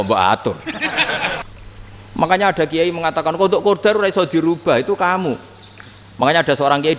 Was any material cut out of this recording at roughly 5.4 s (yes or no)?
no